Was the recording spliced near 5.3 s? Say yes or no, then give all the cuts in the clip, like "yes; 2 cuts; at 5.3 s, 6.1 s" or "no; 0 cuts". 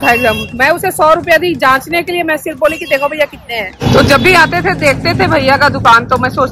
no; 1 cut; at 3.7 s